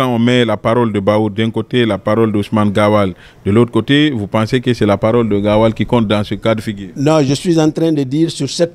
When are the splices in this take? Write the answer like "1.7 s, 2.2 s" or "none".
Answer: none